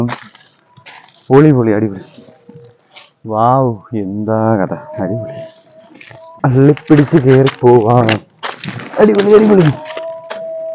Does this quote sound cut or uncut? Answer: cut